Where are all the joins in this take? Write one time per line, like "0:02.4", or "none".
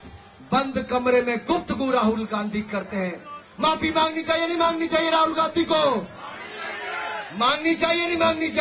none